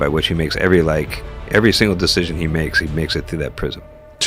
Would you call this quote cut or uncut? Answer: uncut